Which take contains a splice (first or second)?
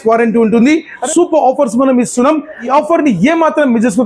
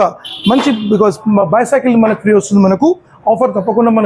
first